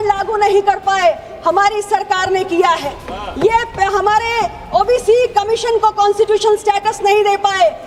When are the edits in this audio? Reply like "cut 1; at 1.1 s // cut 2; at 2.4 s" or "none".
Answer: none